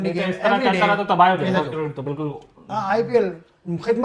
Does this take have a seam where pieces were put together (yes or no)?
no